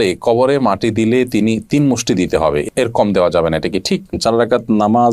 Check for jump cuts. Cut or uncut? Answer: cut